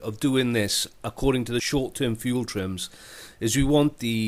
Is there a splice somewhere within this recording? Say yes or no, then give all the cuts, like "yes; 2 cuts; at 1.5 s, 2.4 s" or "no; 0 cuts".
yes; 1 cut; at 1.7 s